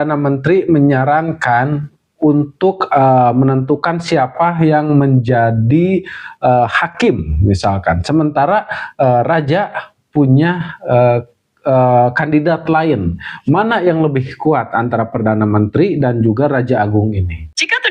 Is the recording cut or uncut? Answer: uncut